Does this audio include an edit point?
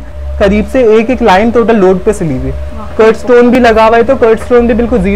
no; 0 cuts

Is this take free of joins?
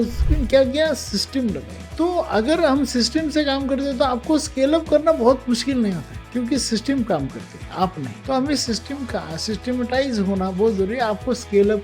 yes; 0 cuts

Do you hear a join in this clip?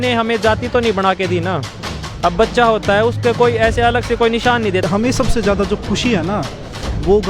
yes; 1 cut; at 4.9 s

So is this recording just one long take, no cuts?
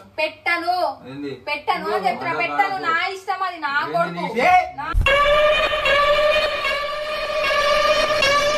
yes; 0 cuts

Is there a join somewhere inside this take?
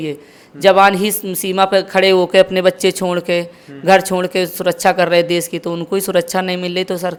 no; 0 cuts

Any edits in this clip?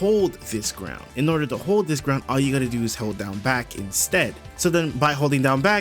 yes; 2 cuts; at 1.0 s, 4.4 s

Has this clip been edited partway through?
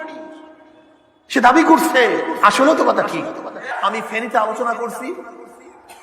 yes; 1 cut; at 3.7 s

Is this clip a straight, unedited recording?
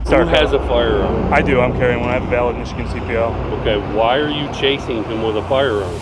yes; 0 cuts

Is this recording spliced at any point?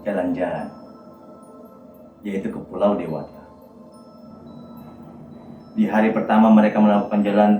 yes; 1 cut; at 4.3 s

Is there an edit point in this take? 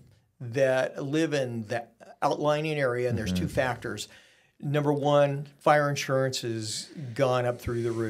no; 0 cuts

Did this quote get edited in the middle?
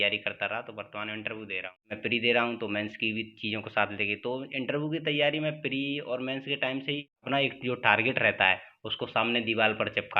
yes; 2 cuts; at 1.9 s, 7.2 s

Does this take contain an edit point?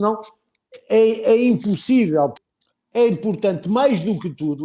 yes; 1 cut; at 2.4 s

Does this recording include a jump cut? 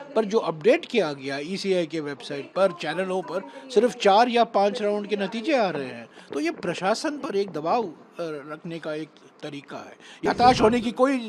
yes; 1 cut; at 10.2 s

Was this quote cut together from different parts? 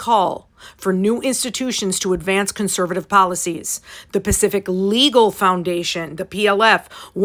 no; 0 cuts

